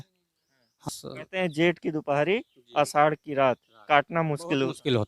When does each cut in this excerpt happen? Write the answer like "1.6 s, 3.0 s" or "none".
0.9 s